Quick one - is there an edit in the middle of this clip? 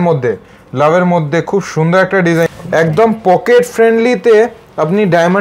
yes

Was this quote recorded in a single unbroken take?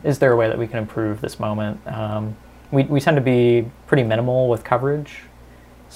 yes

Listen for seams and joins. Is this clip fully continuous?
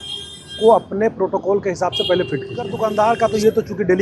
no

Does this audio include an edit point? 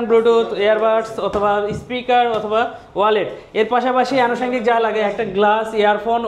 no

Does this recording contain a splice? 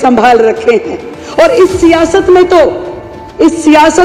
no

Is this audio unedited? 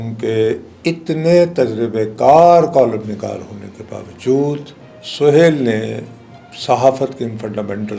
yes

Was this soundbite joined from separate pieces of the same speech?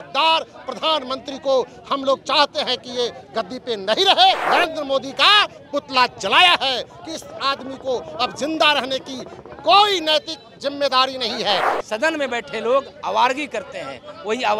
yes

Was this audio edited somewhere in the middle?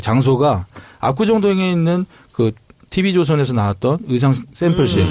yes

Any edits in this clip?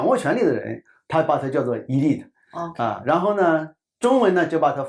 no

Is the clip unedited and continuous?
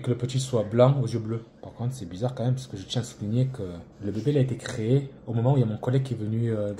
no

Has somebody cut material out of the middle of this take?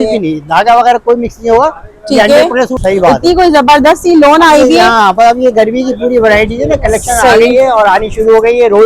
yes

